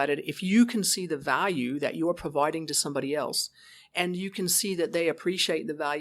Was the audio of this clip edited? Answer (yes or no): no